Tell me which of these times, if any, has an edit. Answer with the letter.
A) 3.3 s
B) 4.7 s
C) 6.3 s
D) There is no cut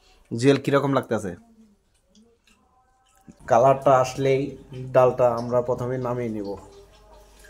A